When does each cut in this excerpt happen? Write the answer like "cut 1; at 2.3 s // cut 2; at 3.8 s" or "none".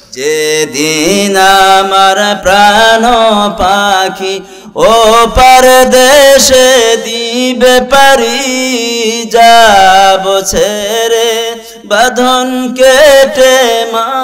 none